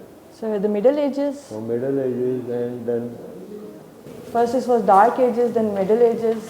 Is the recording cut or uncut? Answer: uncut